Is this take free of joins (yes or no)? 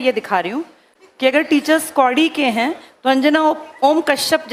yes